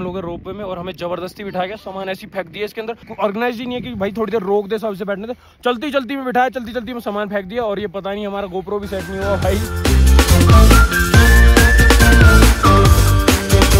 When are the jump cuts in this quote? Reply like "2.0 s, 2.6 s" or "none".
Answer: none

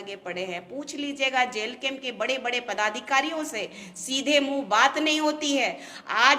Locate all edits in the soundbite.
none

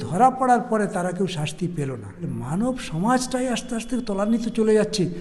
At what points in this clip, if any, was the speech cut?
2.2 s

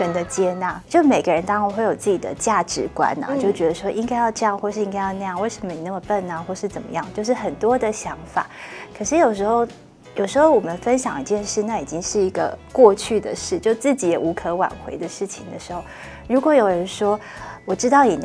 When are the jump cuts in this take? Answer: none

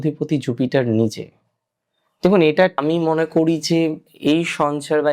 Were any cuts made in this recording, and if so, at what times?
2.8 s

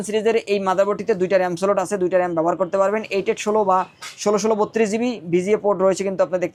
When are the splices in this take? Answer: none

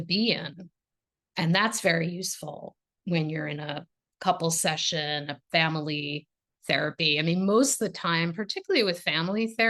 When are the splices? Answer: 3.9 s

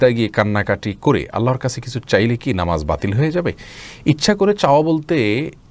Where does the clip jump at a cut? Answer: none

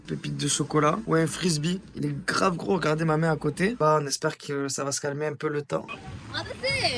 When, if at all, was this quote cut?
3.8 s

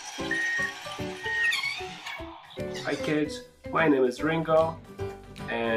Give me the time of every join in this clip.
2.1 s

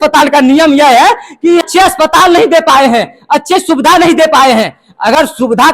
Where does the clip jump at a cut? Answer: 1.6 s

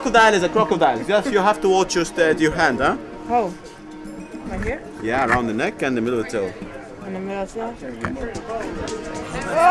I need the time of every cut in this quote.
none

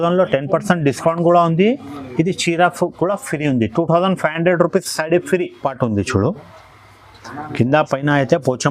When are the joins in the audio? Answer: 5.6 s

